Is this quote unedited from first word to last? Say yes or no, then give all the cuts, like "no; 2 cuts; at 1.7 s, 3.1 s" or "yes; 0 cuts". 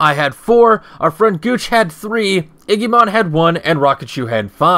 yes; 0 cuts